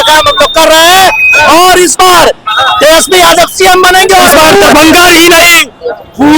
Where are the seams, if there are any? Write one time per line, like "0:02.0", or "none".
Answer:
0:04.3